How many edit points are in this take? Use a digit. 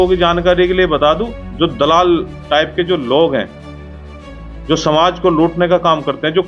1